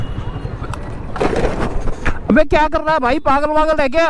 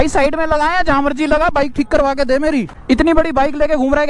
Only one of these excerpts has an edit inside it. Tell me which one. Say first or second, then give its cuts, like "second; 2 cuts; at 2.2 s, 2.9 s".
second; 1 cut; at 2.7 s